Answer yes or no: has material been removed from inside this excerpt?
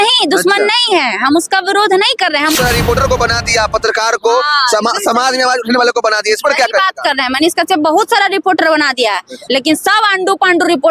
yes